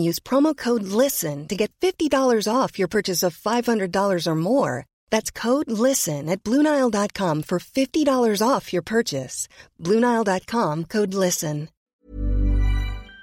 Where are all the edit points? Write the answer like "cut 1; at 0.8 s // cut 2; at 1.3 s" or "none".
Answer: cut 1; at 11.9 s